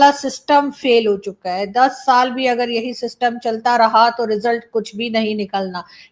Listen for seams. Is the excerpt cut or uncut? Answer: uncut